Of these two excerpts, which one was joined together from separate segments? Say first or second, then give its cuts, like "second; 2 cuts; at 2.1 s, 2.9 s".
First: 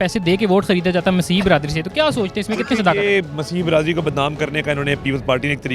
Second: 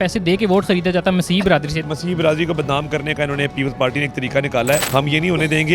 second; 2 cuts; at 1.8 s, 4.9 s